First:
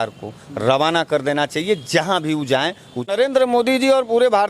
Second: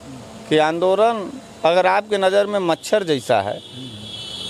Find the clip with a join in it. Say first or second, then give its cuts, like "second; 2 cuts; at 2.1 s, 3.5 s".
first; 1 cut; at 3.1 s